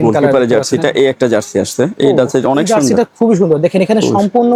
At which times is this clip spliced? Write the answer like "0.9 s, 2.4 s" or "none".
none